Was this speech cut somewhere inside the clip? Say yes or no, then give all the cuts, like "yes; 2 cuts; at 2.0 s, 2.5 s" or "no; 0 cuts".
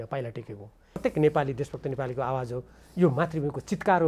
yes; 1 cut; at 1.0 s